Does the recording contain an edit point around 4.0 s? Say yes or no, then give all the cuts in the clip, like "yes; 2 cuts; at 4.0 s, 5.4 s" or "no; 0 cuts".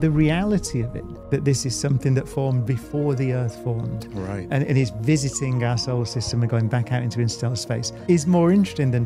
no; 0 cuts